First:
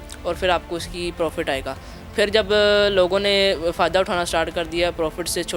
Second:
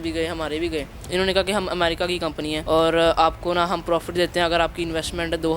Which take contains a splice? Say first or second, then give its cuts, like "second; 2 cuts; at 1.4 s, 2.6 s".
second; 2 cuts; at 1.0 s, 2.6 s